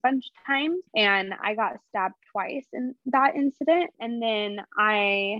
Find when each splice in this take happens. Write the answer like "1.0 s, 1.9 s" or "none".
0.9 s, 4.0 s